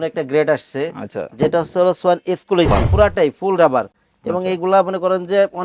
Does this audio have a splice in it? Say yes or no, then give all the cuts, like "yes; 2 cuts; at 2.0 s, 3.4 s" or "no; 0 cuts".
yes; 1 cut; at 2.8 s